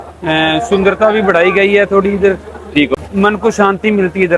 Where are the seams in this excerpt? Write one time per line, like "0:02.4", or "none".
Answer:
0:02.9